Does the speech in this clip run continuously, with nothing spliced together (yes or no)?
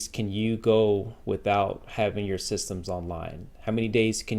yes